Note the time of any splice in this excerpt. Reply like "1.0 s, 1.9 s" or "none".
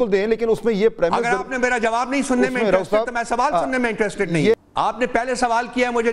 4.5 s

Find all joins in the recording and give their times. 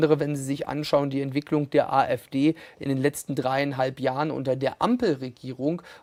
none

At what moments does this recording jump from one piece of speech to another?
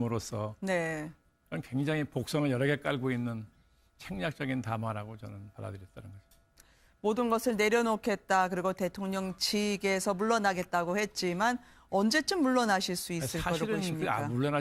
1.8 s

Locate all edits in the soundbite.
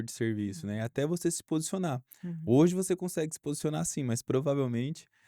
none

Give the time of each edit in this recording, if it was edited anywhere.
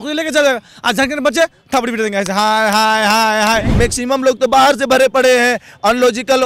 3.7 s

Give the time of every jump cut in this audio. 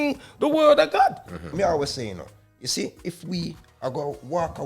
1.5 s

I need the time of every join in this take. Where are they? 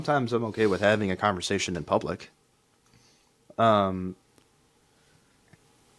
none

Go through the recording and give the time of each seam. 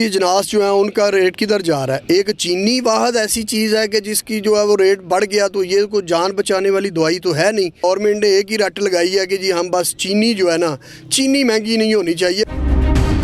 7.8 s, 12.5 s

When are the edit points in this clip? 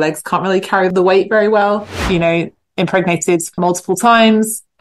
0.9 s, 1.9 s, 3.6 s

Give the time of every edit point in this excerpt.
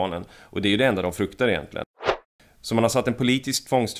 1.9 s

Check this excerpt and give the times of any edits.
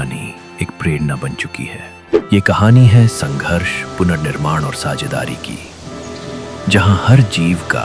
2.2 s

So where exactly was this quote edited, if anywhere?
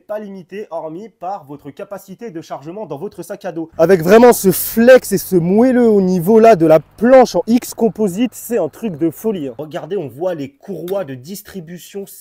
3.7 s, 9.6 s

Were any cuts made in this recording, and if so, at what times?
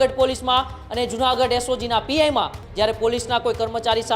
2.6 s

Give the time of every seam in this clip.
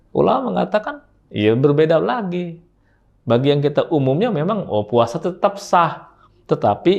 none

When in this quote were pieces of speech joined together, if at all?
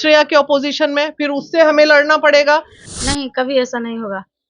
2.8 s

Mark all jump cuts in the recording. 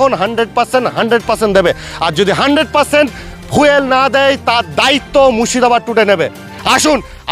none

